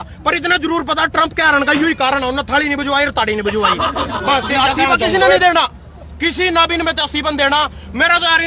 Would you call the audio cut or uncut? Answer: cut